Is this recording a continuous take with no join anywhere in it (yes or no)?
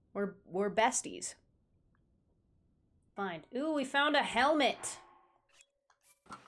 no